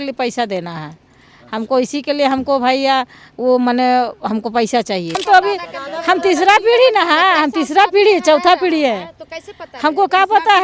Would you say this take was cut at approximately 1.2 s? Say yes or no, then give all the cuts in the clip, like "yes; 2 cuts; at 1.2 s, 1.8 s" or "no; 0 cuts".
no; 1 cut; at 5.1 s